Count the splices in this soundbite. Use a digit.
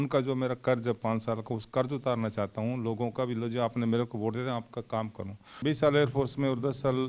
1